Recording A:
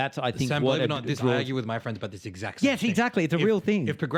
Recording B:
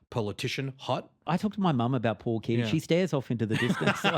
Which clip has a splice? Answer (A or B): B